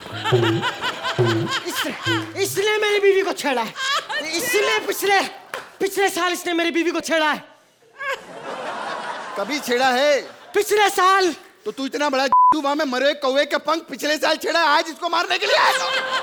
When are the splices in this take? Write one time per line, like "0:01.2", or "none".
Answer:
none